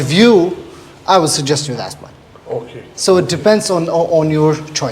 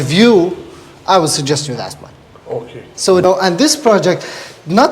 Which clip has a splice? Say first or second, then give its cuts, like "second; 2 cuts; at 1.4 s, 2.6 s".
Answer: second; 1 cut; at 3.2 s